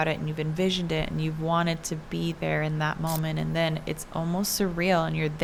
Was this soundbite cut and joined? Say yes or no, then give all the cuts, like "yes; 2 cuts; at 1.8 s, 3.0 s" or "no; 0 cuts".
no; 0 cuts